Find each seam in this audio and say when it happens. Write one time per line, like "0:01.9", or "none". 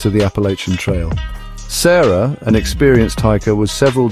none